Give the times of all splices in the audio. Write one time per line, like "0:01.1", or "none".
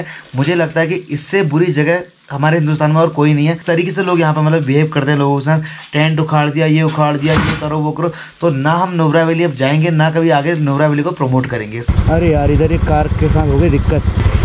0:11.8